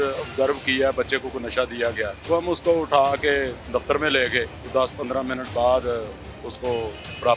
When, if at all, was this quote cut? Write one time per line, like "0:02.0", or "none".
0:02.2
0:04.6